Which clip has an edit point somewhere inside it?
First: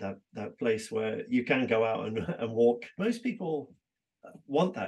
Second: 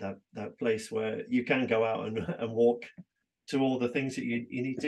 first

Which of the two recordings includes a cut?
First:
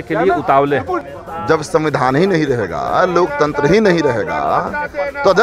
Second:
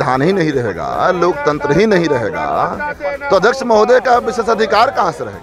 first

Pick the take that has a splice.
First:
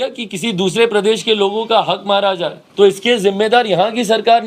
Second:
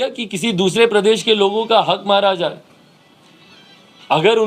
first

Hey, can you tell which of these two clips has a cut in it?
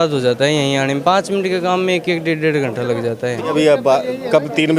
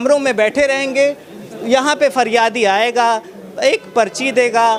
first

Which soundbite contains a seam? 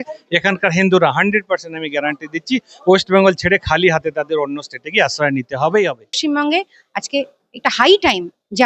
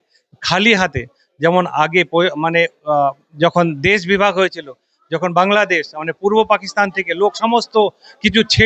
first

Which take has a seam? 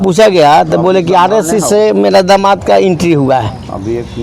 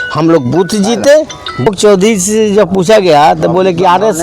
second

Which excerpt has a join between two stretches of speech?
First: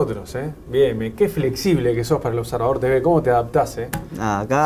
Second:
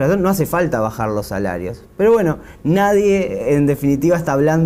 first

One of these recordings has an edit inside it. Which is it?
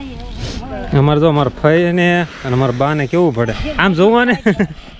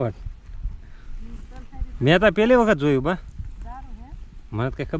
first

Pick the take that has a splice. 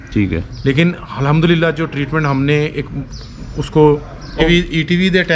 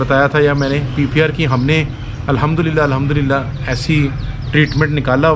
first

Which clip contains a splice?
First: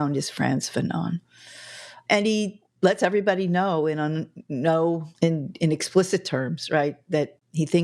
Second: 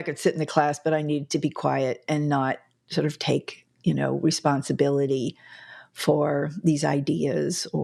first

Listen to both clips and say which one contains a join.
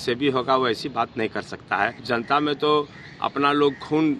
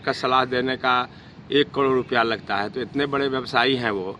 first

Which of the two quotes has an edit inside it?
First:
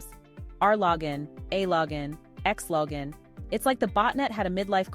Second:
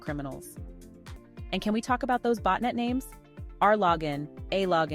second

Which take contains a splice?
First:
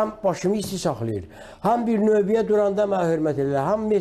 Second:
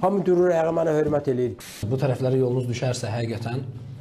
second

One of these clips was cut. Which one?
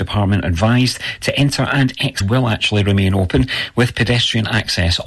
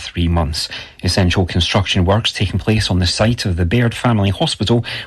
first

